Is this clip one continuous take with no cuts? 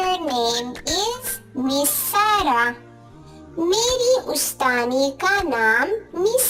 yes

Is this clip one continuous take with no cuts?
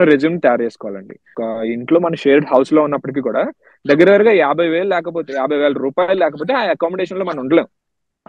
no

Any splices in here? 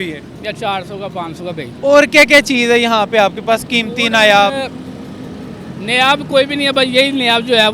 no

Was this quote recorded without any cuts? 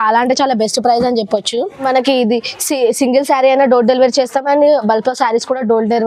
no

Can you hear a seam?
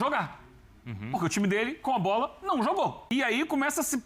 yes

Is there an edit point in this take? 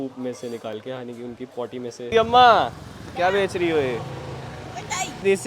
yes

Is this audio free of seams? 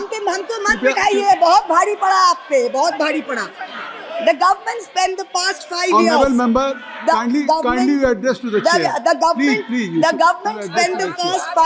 yes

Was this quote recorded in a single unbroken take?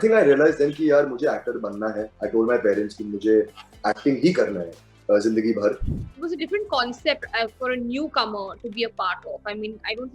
no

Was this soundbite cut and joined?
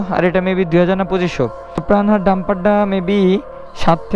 yes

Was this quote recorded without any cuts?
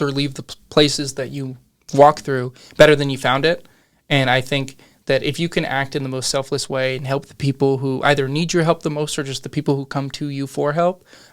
no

